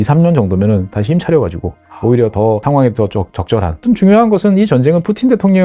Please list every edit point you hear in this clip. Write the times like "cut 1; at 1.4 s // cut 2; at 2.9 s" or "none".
cut 1; at 2.6 s // cut 2; at 3.8 s